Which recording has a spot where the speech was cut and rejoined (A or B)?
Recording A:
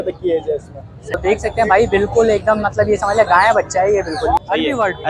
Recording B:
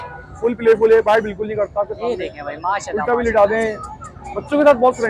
A